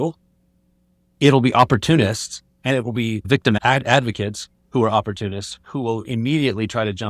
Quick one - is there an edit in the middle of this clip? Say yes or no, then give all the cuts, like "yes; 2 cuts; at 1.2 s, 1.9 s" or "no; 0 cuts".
yes; 1 cut; at 3.3 s